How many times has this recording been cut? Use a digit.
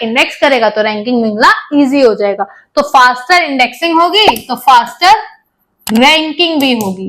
0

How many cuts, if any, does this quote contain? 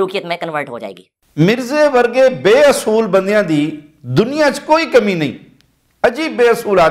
0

